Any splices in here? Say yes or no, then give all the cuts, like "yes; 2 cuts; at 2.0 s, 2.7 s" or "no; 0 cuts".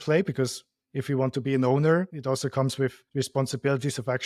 no; 0 cuts